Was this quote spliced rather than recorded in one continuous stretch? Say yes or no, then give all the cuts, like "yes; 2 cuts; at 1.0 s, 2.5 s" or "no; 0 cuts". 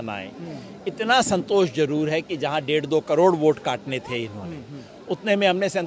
no; 0 cuts